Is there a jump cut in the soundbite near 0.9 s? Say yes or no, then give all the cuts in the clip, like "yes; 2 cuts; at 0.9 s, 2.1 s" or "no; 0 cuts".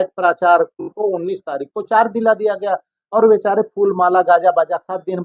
yes; 1 cut; at 0.9 s